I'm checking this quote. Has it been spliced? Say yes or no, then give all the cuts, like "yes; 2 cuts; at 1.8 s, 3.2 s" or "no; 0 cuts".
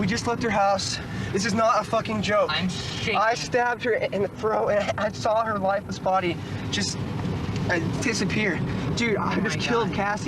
no; 0 cuts